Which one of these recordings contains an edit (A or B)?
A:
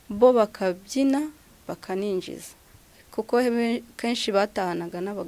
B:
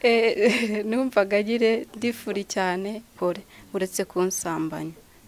B